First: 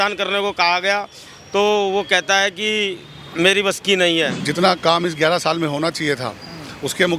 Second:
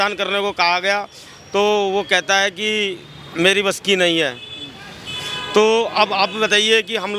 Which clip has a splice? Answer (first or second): first